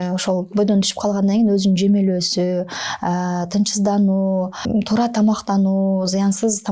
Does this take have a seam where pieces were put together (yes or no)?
yes